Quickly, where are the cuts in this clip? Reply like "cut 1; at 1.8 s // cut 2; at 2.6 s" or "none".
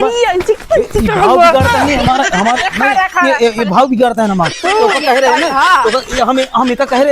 cut 1; at 4.6 s